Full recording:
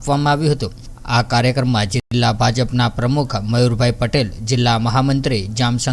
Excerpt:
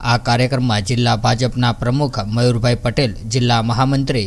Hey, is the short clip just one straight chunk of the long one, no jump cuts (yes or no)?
no